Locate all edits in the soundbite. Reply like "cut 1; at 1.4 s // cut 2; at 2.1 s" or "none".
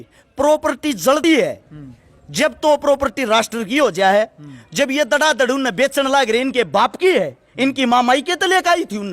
cut 1; at 1.2 s